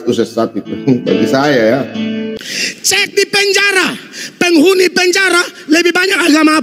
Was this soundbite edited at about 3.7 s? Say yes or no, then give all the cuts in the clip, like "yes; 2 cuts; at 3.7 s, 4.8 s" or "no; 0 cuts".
no; 1 cut; at 2.3 s